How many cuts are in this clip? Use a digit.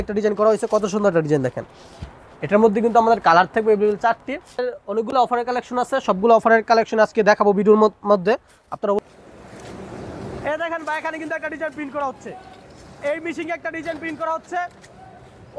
2